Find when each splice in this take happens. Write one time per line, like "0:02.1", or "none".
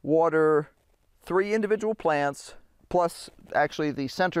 0:02.7